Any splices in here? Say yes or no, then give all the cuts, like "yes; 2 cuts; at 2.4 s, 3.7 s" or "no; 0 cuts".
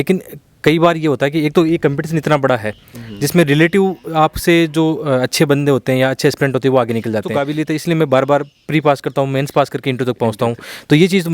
yes; 1 cut; at 7.4 s